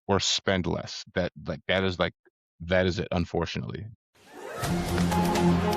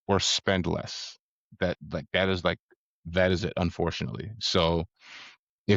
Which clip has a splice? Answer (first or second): first